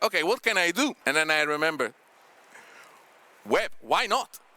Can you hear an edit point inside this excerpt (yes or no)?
yes